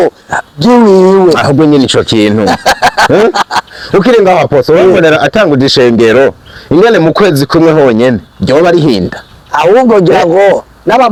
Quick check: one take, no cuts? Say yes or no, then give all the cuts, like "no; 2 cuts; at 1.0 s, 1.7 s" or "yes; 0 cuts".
yes; 0 cuts